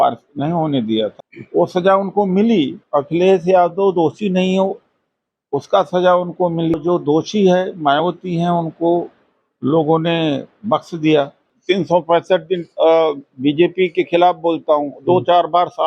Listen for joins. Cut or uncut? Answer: cut